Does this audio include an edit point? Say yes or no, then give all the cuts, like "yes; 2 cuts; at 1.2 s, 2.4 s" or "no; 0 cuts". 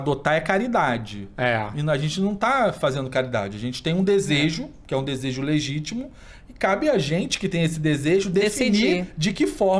no; 0 cuts